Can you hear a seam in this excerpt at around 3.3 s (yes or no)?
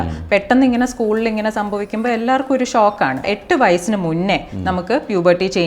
yes